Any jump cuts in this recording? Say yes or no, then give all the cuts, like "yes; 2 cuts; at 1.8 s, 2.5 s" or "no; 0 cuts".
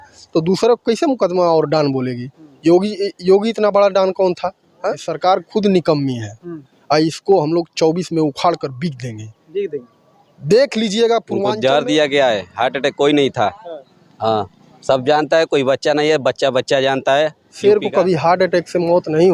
yes; 3 cuts; at 5.1 s, 11.5 s, 17.4 s